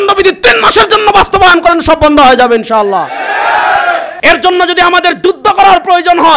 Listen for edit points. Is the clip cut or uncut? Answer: cut